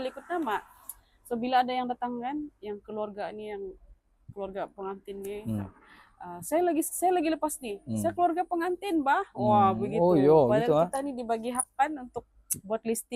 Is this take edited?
no; 0 cuts

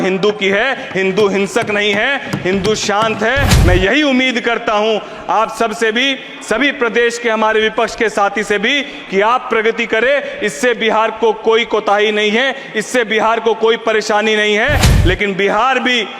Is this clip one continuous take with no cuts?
no; 1 cut; at 3.5 s

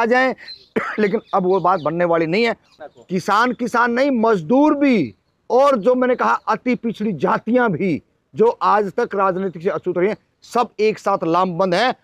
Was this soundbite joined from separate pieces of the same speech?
yes; 1 cut; at 2.7 s

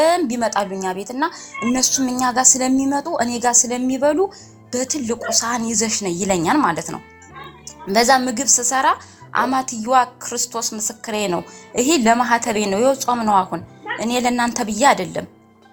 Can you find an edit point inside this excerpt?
no; 0 cuts

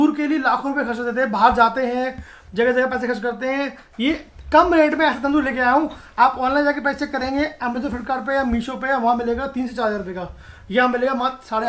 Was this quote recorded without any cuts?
yes; 0 cuts

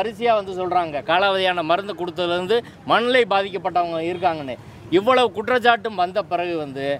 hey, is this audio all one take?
yes; 0 cuts

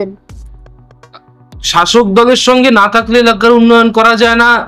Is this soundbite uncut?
yes; 0 cuts

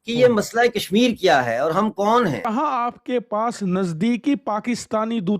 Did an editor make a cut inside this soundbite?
yes; 1 cut; at 2.4 s

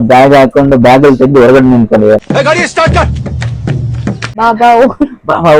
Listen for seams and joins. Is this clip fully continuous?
no; 2 cuts; at 2.2 s, 4.3 s

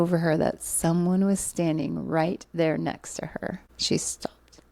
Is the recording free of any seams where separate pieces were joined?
yes; 0 cuts

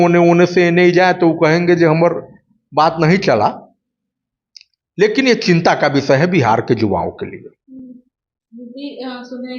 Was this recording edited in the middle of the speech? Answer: no; 0 cuts

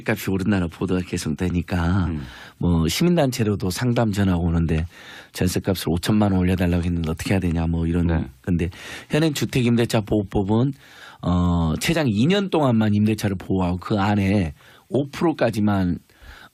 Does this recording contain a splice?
no; 0 cuts

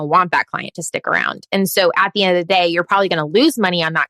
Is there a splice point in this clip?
no; 0 cuts

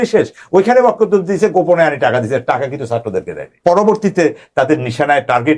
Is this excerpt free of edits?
no; 1 cut; at 3.6 s

